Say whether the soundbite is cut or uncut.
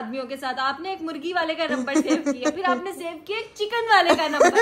uncut